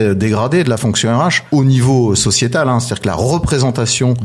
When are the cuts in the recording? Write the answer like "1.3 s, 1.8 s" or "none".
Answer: none